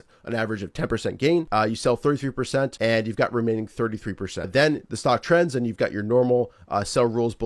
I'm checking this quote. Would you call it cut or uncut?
cut